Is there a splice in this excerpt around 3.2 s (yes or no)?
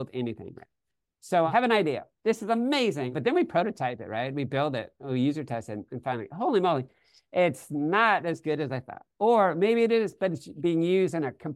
yes